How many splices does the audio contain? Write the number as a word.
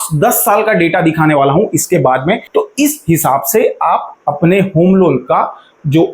one